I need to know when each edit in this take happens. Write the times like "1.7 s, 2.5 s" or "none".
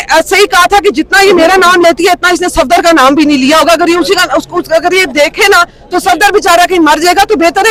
none